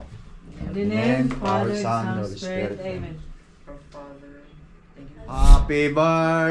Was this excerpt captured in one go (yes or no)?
no